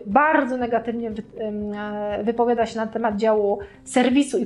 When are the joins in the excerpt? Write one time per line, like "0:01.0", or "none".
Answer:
none

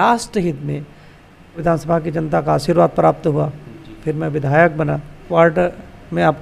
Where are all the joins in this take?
0:01.6
0:05.3

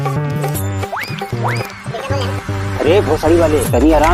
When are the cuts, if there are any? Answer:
none

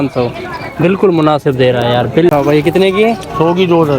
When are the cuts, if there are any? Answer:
0:02.3

